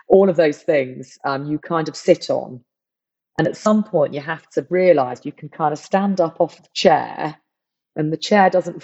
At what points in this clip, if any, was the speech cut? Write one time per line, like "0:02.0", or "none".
none